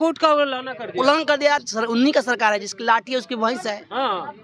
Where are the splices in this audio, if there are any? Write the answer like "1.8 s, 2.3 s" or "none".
1.6 s